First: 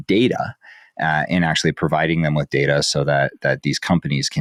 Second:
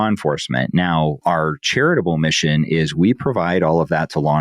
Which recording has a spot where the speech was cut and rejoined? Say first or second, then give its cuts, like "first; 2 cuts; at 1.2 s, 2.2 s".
second; 1 cut; at 1.2 s